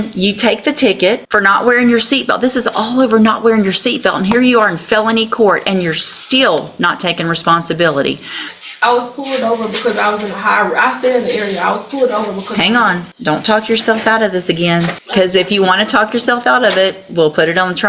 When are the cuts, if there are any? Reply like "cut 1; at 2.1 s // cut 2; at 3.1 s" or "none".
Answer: cut 1; at 1.2 s // cut 2; at 8.5 s // cut 3; at 13.1 s // cut 4; at 15.0 s

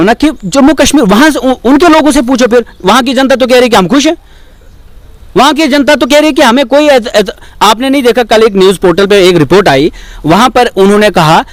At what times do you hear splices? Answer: none

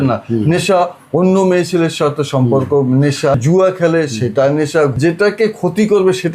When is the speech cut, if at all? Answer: cut 1; at 3.4 s // cut 2; at 5.0 s

